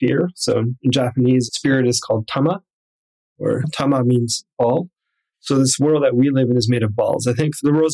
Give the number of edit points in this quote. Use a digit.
0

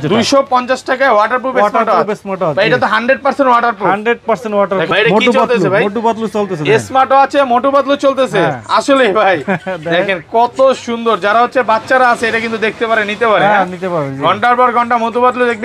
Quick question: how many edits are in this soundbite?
1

